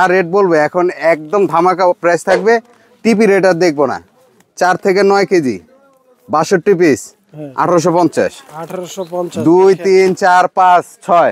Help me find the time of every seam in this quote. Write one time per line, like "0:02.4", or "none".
none